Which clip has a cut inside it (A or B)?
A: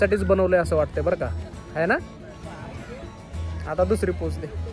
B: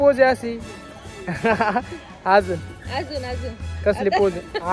A